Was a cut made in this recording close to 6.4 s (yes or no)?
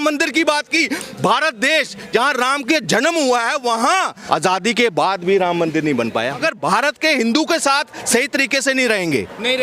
yes